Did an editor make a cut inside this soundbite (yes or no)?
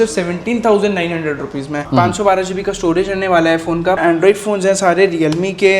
yes